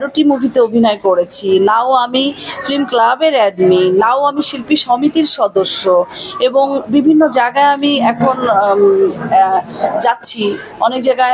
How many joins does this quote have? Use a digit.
0